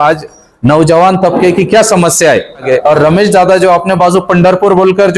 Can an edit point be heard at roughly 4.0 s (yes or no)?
no